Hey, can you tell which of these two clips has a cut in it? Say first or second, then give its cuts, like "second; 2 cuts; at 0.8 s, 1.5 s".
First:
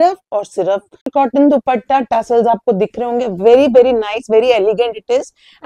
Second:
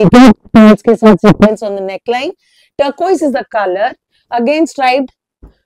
first; 1 cut; at 1.1 s